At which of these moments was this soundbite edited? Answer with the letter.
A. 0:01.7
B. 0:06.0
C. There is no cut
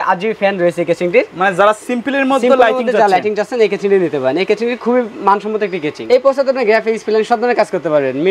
B